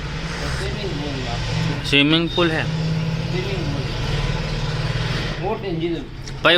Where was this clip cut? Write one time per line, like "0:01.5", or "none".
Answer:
none